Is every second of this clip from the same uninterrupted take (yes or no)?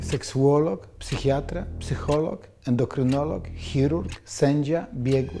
yes